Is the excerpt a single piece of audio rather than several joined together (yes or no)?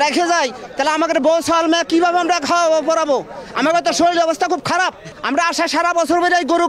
no